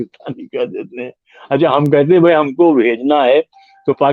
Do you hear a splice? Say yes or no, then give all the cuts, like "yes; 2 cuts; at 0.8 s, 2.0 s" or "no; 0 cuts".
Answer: no; 0 cuts